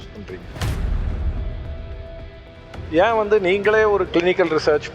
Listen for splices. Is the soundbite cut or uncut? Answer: cut